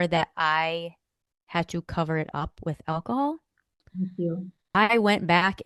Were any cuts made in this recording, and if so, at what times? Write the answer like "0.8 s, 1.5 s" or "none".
none

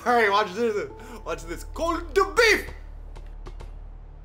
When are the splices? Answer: none

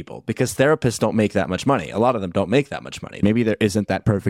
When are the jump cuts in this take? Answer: 3.2 s

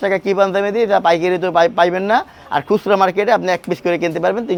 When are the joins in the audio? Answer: none

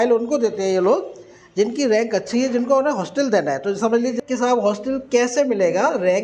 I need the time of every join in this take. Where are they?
4.1 s

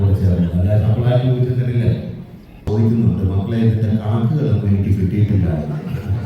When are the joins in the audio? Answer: 2.7 s

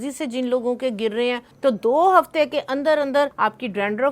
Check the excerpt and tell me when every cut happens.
1.4 s, 3.3 s

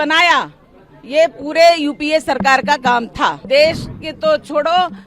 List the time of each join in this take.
3.4 s

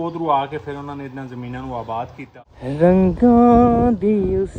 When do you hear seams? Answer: 2.2 s

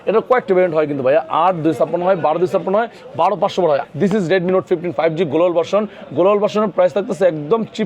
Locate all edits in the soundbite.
3.8 s

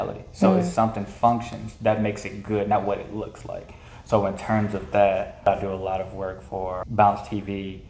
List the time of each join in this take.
5.5 s, 6.8 s

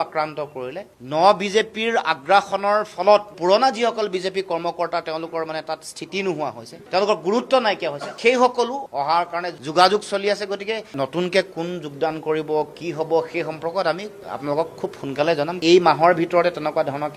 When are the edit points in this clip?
3.3 s, 8.8 s

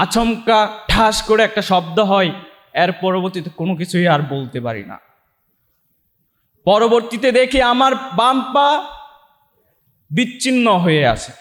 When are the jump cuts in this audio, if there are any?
none

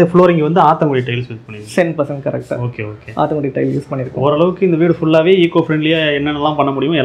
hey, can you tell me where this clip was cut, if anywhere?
none

